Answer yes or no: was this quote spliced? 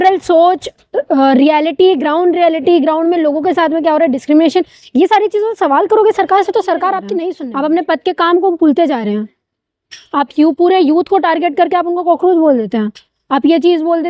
yes